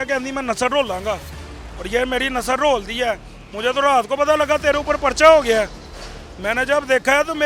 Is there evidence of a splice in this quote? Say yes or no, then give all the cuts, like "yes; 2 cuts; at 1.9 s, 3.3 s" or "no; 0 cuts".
no; 0 cuts